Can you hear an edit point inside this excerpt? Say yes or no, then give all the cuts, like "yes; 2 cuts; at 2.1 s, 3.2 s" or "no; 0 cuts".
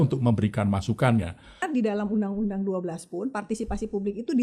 yes; 1 cut; at 1.7 s